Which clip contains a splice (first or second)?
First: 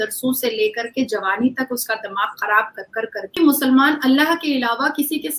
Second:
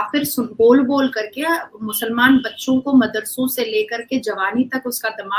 first